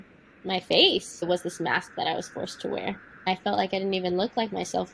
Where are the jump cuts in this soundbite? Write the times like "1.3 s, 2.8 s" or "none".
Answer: 1.2 s, 3.3 s